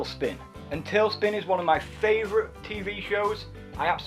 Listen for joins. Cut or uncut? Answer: cut